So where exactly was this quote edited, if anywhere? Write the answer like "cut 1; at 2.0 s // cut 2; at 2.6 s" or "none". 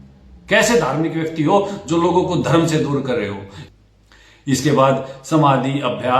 cut 1; at 3.5 s